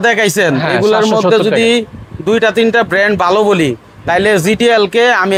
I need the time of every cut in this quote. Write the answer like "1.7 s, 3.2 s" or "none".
none